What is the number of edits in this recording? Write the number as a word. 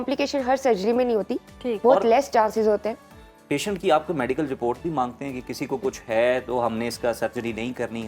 zero